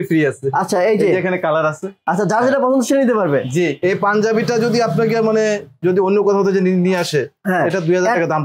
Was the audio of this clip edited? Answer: yes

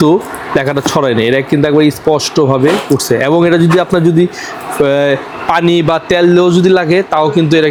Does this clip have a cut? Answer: no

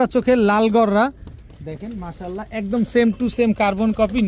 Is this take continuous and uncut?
yes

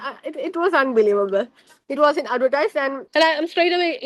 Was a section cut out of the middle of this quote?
yes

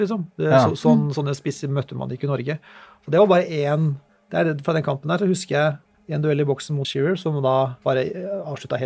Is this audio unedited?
no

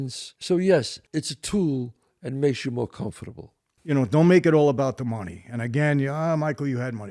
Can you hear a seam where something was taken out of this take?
yes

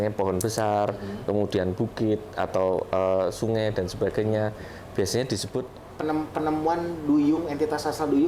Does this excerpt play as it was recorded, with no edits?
no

